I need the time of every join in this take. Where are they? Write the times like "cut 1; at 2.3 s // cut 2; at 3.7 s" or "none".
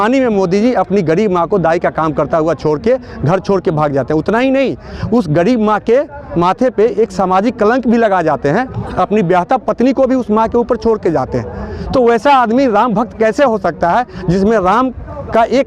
none